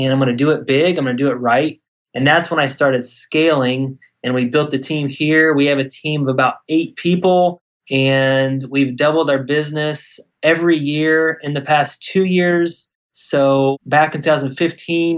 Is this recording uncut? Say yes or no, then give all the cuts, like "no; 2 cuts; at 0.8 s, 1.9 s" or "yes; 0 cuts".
no; 1 cut; at 13.8 s